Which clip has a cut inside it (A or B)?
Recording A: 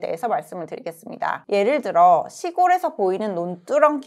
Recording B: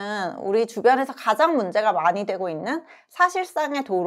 A